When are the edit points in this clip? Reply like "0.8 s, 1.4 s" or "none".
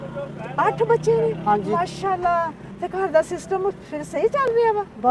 2.6 s